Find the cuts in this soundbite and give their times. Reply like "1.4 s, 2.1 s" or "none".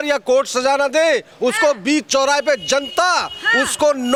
none